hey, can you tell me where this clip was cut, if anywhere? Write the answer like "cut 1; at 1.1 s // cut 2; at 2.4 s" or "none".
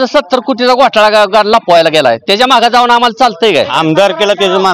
cut 1; at 3.7 s

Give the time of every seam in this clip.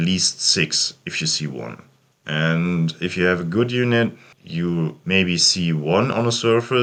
none

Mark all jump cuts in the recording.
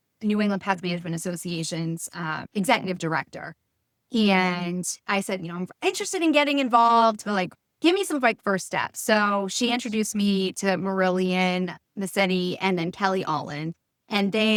none

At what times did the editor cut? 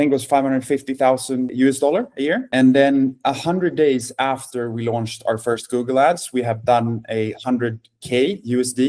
none

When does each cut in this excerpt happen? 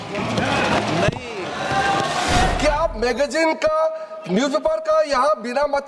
cut 1; at 2.5 s

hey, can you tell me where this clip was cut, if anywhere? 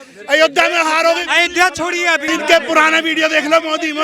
cut 1; at 2.2 s

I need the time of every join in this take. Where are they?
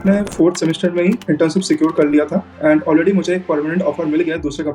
cut 1; at 2.4 s

